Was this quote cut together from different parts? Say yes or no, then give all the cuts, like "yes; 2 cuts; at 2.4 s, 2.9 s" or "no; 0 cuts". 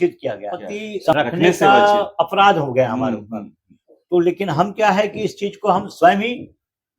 yes; 1 cut; at 1.1 s